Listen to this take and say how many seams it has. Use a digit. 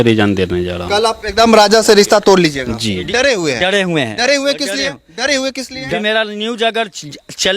2